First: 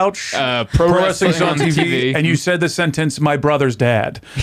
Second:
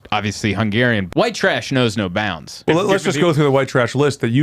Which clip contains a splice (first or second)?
second